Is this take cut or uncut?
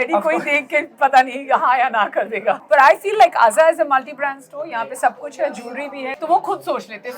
cut